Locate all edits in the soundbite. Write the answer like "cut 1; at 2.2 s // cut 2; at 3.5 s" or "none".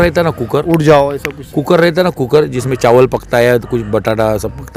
none